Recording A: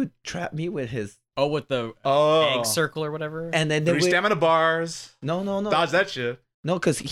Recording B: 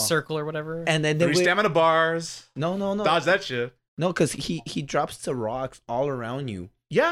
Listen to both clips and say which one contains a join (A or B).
A